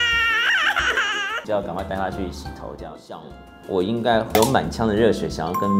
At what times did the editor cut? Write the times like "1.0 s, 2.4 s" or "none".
3.2 s